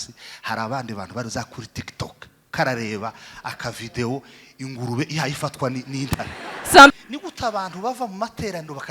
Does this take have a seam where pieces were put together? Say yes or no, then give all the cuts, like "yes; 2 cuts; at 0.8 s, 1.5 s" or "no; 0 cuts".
yes; 1 cut; at 6.9 s